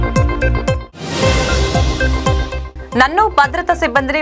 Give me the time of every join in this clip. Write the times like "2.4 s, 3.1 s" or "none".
none